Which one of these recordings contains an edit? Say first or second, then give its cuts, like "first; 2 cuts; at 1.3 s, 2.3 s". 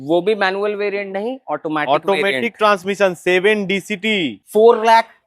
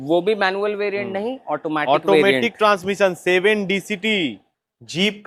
first; 1 cut; at 4.3 s